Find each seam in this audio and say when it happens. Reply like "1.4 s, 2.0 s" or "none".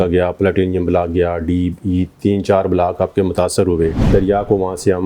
4.0 s